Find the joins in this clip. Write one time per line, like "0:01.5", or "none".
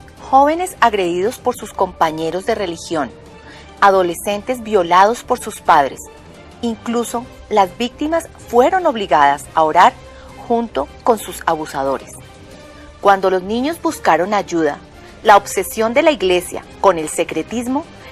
none